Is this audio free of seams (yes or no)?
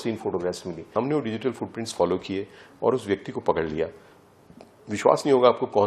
no